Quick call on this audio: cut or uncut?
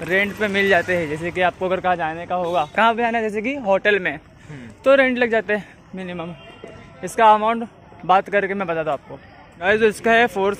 uncut